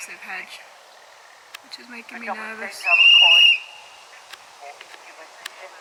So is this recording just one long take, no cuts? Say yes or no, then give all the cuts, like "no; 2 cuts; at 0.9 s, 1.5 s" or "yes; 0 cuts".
yes; 0 cuts